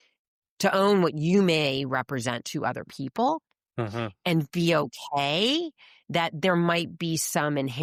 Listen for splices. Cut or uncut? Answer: uncut